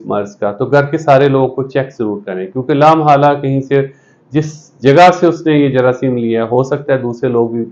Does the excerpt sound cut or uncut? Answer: uncut